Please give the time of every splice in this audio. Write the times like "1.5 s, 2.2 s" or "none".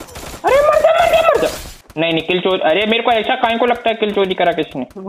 1.7 s